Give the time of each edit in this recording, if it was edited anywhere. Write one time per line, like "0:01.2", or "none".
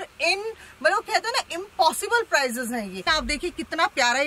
0:03.0